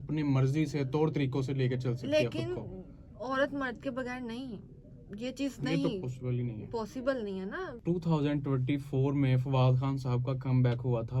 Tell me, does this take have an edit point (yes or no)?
yes